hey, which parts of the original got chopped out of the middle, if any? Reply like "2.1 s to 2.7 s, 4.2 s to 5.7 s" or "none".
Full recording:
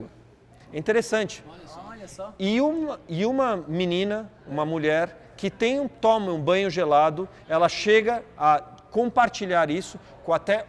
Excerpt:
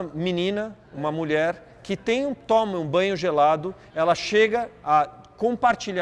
none